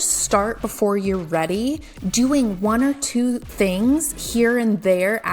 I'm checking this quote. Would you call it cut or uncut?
cut